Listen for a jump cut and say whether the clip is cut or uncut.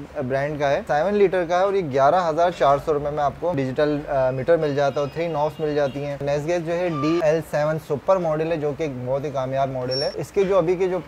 cut